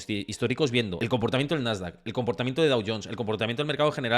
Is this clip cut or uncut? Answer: cut